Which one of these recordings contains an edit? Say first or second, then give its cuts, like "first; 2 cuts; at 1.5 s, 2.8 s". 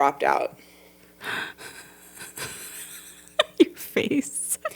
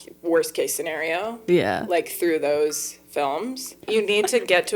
second; 1 cut; at 3.8 s